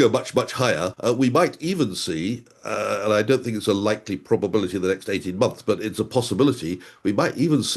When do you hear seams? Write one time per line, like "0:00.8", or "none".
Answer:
0:00.9